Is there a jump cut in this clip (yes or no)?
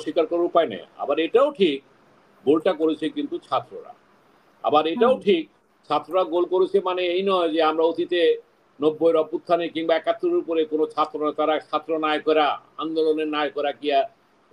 no